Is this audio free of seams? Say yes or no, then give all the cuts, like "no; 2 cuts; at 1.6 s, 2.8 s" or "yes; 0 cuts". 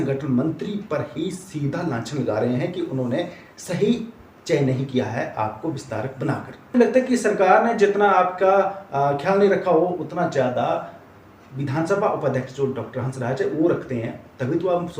no; 1 cut; at 6.8 s